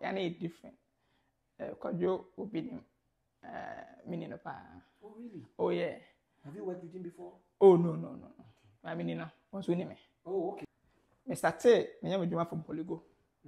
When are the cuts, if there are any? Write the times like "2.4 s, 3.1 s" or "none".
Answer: 10.7 s